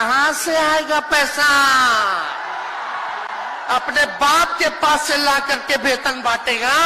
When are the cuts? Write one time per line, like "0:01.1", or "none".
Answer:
none